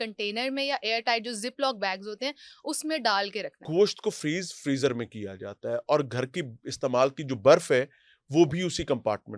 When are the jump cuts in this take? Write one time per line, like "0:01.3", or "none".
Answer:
0:03.6